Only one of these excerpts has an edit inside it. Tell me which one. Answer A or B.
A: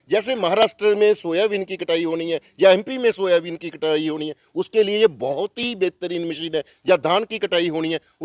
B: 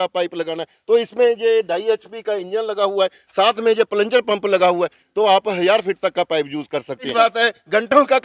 B